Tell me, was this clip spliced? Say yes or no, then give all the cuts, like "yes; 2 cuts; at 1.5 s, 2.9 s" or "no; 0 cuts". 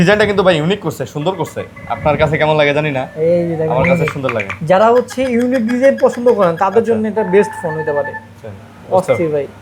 no; 0 cuts